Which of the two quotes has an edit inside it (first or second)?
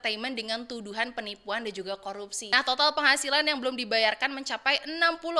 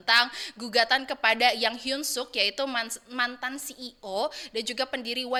first